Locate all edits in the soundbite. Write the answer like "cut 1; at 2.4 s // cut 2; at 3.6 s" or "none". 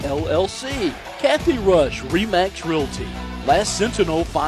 cut 1; at 1.1 s